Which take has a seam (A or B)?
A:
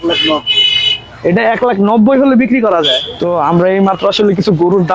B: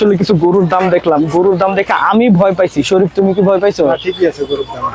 A